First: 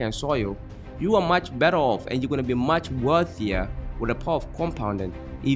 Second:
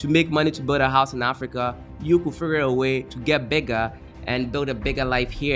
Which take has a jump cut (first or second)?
second